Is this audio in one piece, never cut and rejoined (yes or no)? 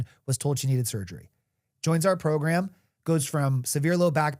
yes